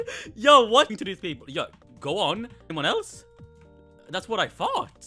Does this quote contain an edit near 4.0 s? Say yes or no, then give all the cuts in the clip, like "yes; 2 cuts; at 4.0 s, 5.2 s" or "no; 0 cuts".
no; 2 cuts; at 0.9 s, 2.7 s